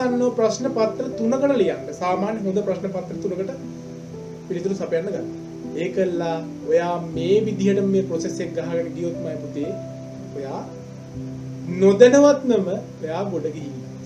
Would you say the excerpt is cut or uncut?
uncut